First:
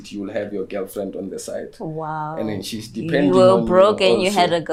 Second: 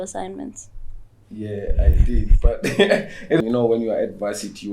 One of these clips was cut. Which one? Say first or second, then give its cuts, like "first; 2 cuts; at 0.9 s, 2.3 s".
second; 1 cut; at 3.4 s